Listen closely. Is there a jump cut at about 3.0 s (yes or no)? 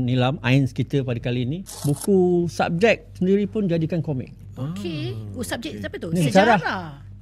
no